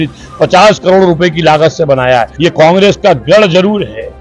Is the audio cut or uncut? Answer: cut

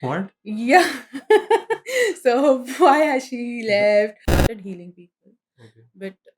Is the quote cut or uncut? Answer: cut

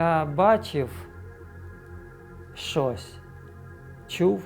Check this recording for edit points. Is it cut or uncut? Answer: cut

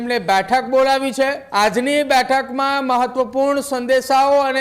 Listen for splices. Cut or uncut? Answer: cut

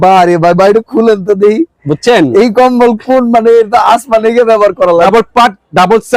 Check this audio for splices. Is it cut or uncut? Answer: cut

